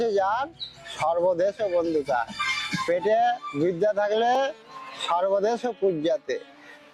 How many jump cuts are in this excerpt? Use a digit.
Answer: 0